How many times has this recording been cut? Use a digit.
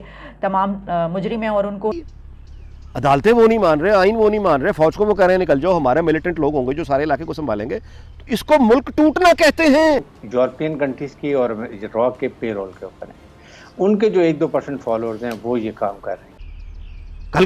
3